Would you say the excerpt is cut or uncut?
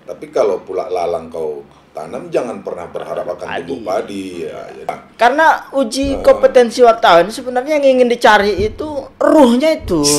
cut